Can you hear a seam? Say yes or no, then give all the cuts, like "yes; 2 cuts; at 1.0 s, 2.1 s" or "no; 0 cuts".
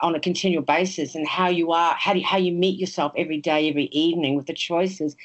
no; 0 cuts